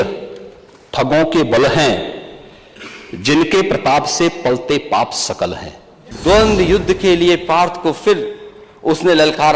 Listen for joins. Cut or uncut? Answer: cut